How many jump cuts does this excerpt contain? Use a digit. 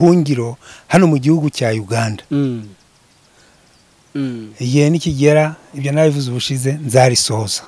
1